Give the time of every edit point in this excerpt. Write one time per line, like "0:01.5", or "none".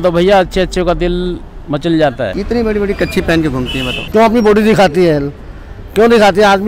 none